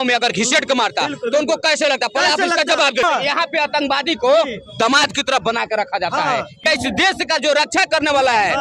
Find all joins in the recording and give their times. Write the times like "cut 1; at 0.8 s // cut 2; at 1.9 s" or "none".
cut 1; at 3.0 s // cut 2; at 6.6 s